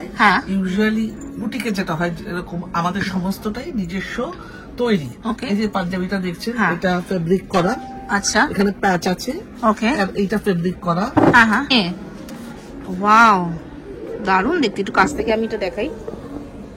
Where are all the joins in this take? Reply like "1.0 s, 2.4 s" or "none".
11.7 s